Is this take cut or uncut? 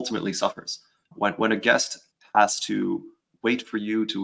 cut